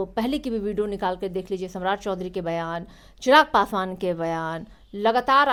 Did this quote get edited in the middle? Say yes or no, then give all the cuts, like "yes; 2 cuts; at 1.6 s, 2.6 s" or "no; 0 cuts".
no; 0 cuts